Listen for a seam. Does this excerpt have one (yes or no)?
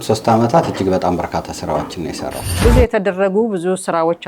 yes